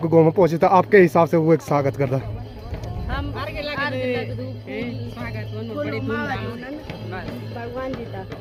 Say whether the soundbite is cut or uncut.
uncut